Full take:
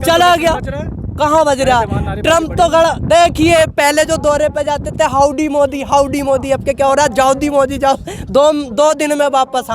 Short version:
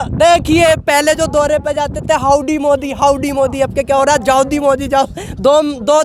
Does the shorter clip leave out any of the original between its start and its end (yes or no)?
no